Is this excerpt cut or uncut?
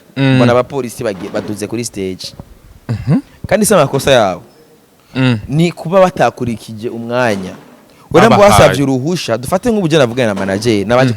uncut